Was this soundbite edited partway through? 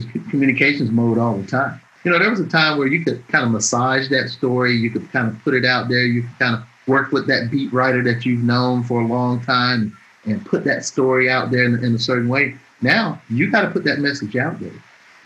yes; 2 cuts; at 1.9 s, 3.3 s

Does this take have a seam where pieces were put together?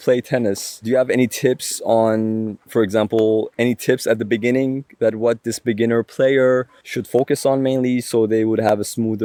no; 0 cuts

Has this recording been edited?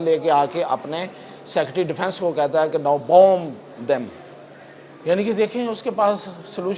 no; 0 cuts

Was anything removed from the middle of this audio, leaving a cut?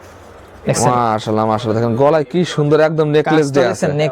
no; 0 cuts

